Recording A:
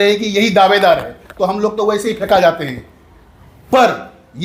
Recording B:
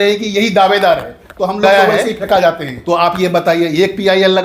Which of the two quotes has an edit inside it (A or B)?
B